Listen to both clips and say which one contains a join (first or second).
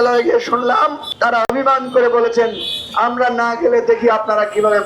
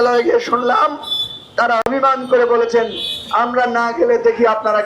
first